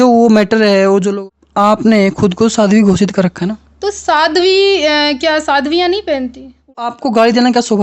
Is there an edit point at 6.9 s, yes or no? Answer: yes